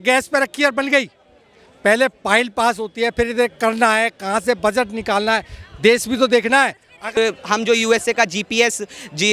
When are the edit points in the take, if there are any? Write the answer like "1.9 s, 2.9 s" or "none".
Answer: 7.2 s